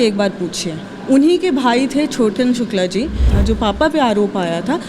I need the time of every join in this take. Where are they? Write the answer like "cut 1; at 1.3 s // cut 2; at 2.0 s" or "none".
cut 1; at 3.3 s